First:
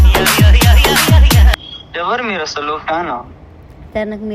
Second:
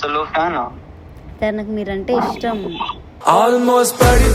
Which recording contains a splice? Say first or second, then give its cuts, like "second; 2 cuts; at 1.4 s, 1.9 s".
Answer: first; 1 cut; at 1.5 s